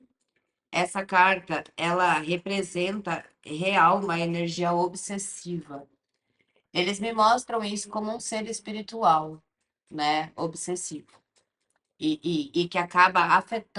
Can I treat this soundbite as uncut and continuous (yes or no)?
yes